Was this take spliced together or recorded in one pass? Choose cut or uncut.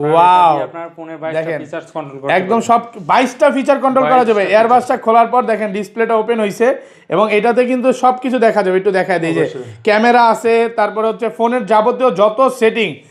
uncut